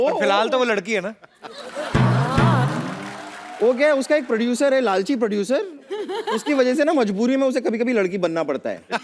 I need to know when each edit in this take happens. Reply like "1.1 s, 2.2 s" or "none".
none